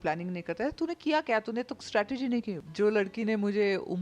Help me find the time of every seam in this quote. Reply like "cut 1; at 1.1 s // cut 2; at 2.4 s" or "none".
cut 1; at 2.6 s